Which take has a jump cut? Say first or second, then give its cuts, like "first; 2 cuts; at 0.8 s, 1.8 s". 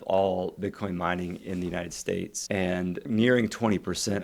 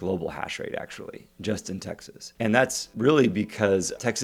first; 1 cut; at 2.4 s